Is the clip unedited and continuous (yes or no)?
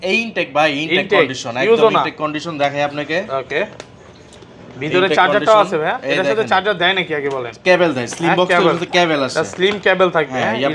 yes